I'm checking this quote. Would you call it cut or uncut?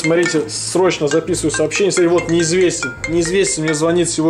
uncut